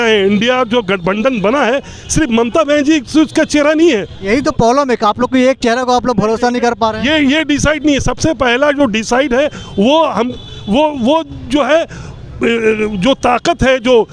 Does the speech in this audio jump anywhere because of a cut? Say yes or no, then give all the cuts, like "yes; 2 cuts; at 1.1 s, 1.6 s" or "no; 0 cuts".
no; 0 cuts